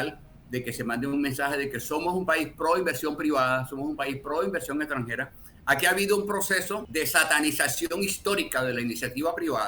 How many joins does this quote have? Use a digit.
1